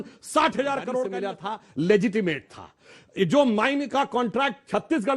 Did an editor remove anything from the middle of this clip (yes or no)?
yes